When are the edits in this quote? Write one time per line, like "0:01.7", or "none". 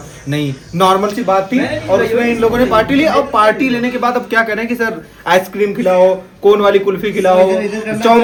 none